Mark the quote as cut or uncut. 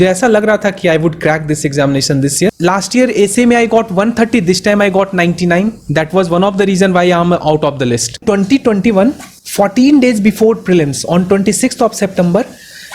cut